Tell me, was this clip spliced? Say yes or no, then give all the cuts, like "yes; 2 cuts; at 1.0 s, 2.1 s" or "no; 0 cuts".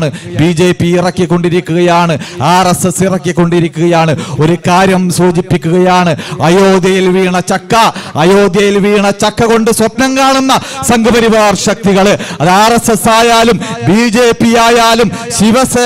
no; 0 cuts